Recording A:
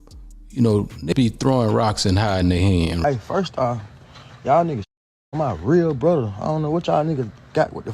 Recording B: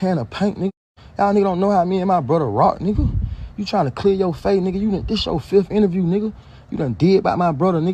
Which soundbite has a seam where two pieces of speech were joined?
A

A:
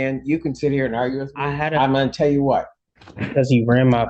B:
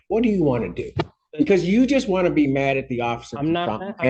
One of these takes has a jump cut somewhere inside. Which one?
A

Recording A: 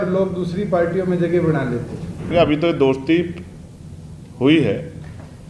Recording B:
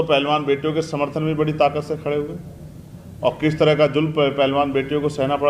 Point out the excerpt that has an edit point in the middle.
A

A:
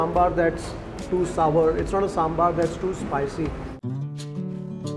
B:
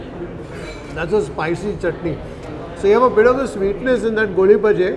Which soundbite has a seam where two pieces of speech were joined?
A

